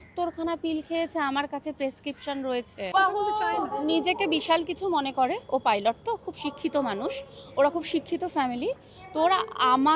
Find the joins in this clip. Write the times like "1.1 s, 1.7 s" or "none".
2.9 s